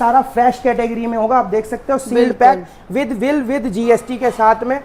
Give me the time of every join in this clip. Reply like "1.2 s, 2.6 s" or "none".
none